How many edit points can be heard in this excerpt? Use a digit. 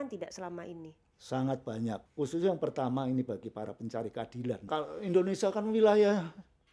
2